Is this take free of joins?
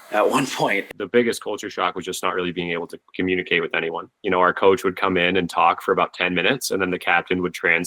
no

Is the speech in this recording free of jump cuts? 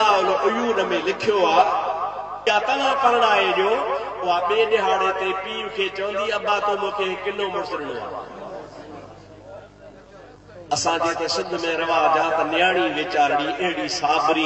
no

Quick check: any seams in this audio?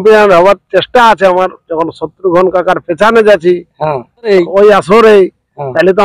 yes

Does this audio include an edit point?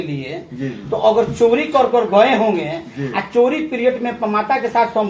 no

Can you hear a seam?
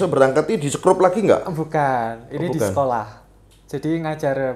no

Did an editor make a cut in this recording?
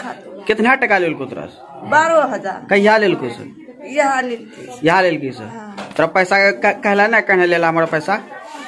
no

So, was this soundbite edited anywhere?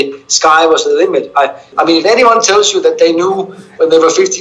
yes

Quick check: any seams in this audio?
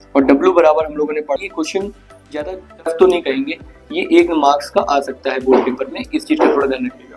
yes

